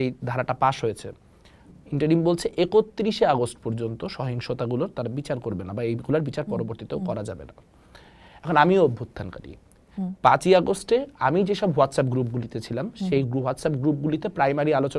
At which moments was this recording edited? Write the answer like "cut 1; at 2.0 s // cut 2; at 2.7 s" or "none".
none